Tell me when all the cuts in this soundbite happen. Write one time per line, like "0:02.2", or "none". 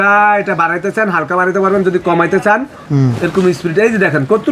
0:02.8